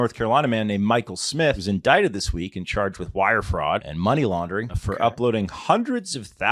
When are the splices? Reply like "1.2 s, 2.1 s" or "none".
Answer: 1.6 s, 3.9 s, 4.8 s